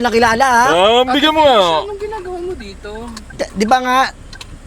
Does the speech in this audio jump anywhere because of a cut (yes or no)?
no